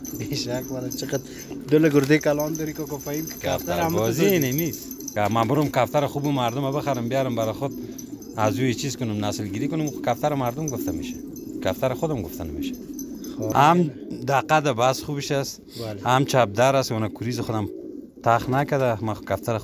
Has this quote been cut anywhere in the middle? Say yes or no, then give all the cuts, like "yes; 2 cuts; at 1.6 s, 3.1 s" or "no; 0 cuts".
yes; 2 cuts; at 5.1 s, 13.5 s